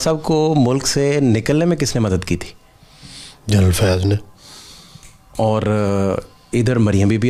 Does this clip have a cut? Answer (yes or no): no